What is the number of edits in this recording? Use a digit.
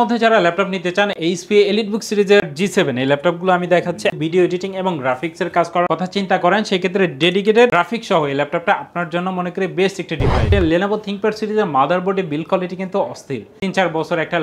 4